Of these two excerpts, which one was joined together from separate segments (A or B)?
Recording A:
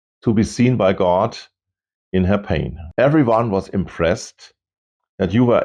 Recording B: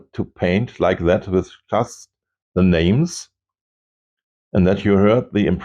A